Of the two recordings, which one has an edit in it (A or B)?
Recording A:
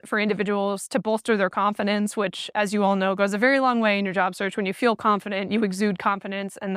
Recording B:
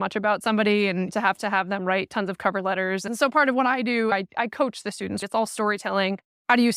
B